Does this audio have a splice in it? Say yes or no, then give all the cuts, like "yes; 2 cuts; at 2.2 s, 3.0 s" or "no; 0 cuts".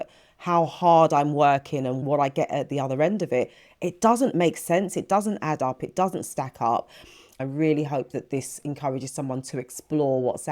yes; 1 cut; at 7.4 s